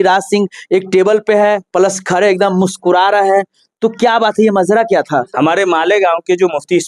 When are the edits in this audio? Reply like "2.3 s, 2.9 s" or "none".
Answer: none